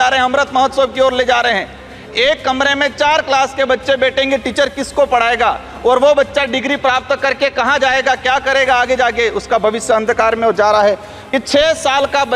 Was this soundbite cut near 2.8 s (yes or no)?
no